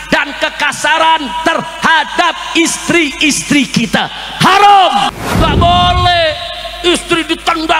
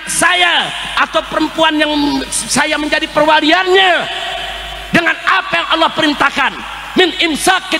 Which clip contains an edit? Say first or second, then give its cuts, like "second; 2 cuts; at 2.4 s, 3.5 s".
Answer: first; 1 cut; at 5.1 s